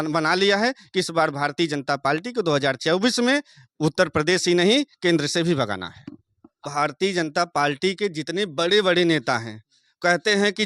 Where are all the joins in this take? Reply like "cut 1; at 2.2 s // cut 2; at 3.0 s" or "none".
cut 1; at 6.5 s